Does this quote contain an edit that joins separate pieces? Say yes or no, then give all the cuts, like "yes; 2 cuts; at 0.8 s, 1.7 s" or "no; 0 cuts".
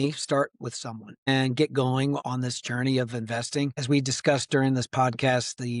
yes; 3 cuts; at 1.3 s, 2.2 s, 3.8 s